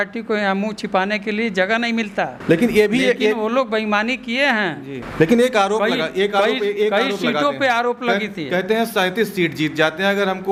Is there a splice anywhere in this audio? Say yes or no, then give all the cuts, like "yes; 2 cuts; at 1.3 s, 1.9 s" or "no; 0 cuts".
no; 0 cuts